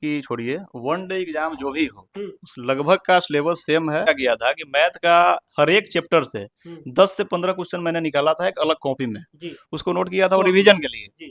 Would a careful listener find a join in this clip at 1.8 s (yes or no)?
no